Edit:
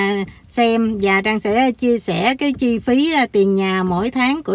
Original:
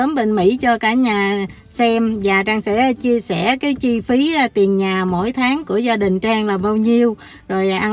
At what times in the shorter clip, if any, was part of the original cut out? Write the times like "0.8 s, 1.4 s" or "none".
none